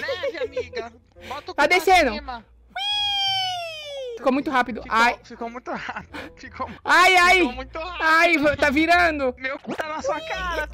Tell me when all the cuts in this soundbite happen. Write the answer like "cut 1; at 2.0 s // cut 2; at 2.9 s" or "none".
cut 1; at 4.1 s